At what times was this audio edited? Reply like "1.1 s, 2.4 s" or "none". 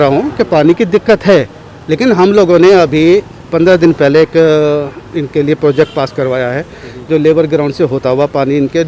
none

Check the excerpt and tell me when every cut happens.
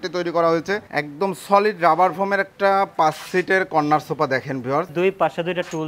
0.9 s, 4.9 s

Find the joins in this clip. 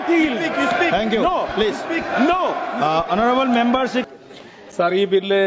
4.1 s

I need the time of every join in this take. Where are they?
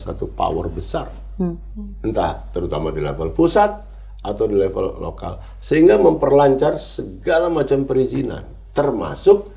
none

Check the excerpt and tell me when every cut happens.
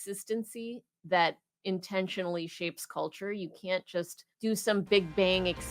4.2 s

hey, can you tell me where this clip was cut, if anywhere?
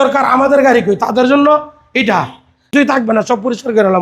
2.7 s

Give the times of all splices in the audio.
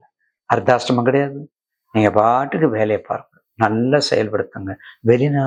none

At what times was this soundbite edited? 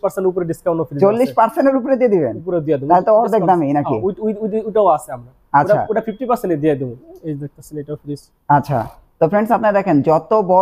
7.0 s

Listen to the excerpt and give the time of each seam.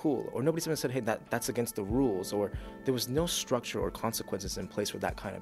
none

